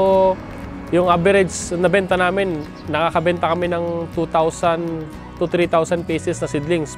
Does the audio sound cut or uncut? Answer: uncut